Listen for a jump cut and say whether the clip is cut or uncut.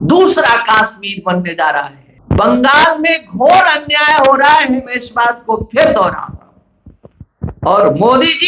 cut